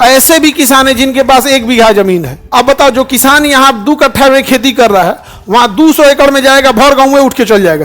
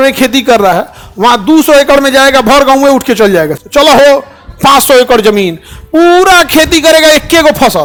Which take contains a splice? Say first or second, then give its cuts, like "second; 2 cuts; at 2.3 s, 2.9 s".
first; 1 cut; at 2.4 s